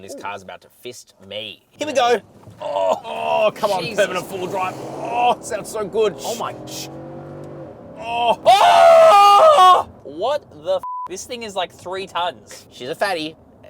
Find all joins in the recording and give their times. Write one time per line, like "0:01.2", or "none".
0:08.4
0:10.0